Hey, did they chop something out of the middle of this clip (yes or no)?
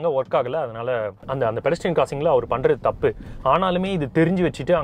yes